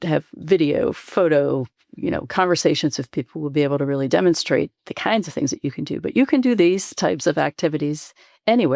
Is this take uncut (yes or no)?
yes